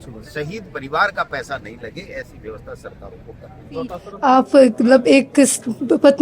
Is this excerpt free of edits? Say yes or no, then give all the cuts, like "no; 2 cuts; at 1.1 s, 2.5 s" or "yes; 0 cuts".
no; 1 cut; at 4.1 s